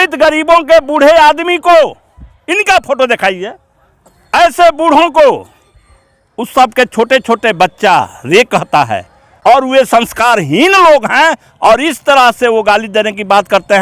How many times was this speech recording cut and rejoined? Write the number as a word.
one